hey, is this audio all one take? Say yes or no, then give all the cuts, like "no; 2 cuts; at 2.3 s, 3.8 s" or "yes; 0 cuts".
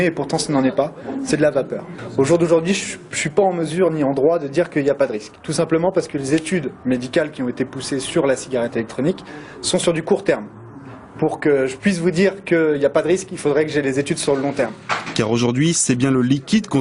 no; 1 cut; at 10.0 s